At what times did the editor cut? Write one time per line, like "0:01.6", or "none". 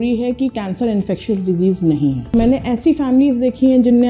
0:02.3